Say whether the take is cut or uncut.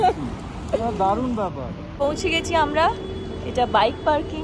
cut